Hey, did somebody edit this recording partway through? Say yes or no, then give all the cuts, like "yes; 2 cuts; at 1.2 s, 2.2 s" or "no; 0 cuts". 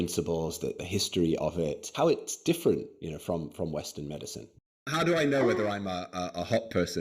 yes; 3 cuts; at 0.8 s, 1.9 s, 4.5 s